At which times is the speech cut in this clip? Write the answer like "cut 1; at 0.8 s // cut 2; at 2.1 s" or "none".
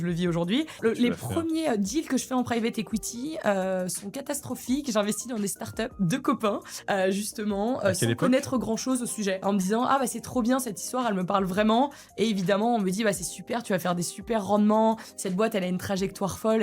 cut 1; at 0.8 s // cut 2; at 5.9 s // cut 3; at 9.4 s